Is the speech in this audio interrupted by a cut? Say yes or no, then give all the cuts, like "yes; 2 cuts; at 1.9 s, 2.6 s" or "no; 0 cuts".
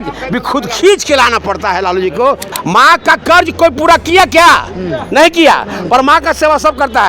yes; 1 cut; at 2.5 s